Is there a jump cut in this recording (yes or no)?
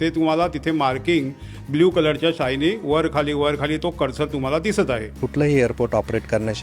yes